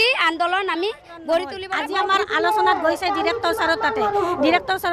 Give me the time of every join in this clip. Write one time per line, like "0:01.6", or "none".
0:01.6